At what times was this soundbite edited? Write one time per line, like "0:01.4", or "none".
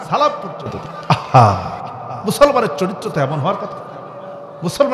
0:00.9